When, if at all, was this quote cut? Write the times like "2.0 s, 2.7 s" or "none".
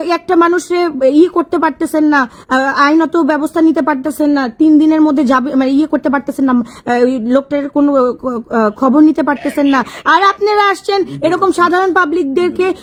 none